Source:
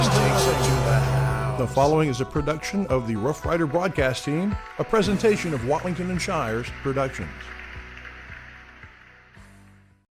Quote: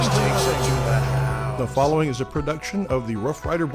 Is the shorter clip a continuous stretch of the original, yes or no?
yes